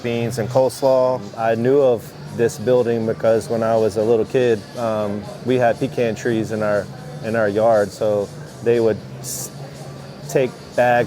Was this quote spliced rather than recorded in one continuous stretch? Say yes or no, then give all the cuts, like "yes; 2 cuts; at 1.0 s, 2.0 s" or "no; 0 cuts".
yes; 1 cut; at 1.3 s